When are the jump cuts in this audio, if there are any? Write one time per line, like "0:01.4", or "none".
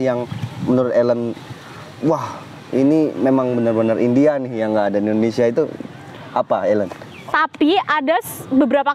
0:07.1

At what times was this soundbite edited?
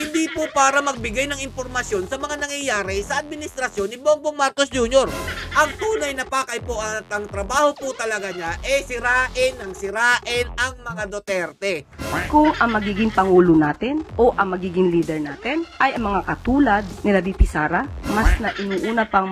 0:11.9

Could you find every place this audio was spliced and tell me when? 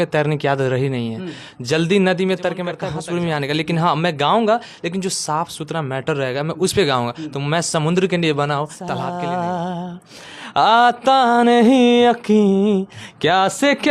0:02.9
0:08.9

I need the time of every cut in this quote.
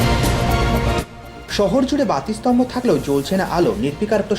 0:00.9

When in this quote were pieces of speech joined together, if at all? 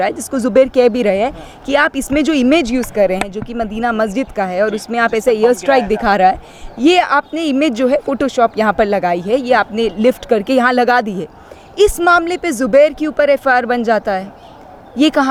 none

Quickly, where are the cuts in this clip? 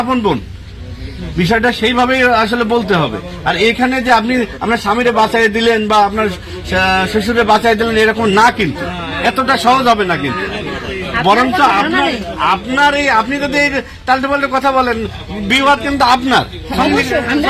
none

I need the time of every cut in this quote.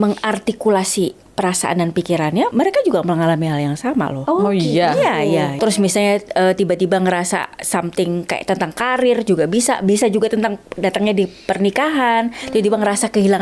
0:02.5
0:04.2
0:05.5

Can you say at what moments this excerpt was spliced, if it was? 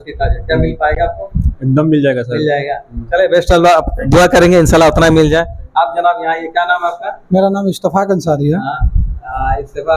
none

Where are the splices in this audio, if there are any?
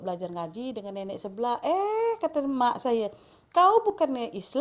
none

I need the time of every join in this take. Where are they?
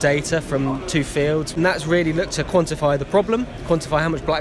0:01.6

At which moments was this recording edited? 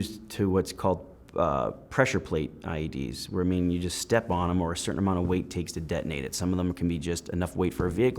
none

